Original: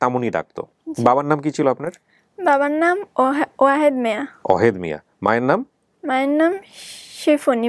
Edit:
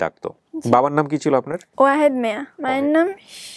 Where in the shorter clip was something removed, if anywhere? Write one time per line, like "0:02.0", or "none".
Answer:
0:01.7
0:02.5